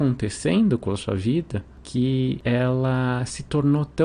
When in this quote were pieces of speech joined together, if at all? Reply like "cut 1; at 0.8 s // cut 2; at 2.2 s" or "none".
none